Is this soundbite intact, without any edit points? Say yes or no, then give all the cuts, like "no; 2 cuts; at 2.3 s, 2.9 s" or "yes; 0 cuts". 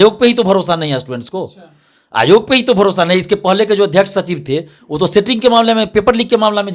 yes; 0 cuts